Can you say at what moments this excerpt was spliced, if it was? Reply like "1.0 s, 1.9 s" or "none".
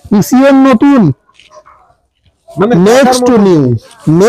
none